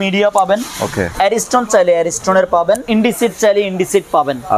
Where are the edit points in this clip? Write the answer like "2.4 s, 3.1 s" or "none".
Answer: 1.0 s, 2.8 s